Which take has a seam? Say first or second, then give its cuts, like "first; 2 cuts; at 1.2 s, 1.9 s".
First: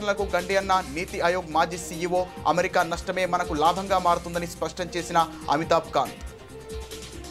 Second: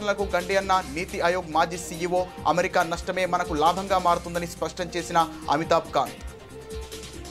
second; 1 cut; at 6.2 s